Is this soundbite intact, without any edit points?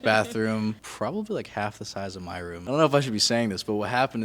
no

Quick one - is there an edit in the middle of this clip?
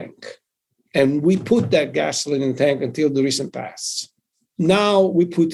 no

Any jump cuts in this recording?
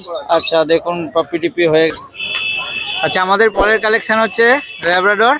yes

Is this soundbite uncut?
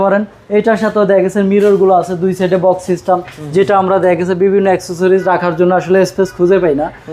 yes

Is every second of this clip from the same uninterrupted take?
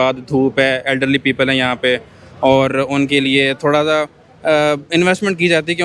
yes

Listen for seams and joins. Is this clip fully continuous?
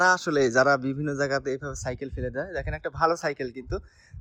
yes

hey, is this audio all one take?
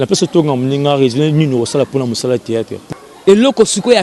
no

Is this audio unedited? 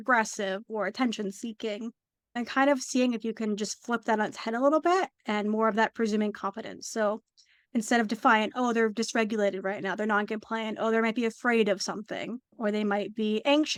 yes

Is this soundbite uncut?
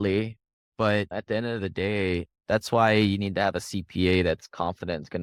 yes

